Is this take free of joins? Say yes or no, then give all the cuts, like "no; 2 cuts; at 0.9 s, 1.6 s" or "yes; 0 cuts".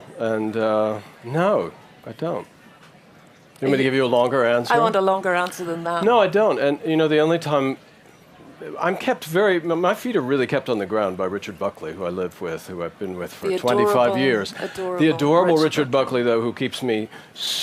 yes; 0 cuts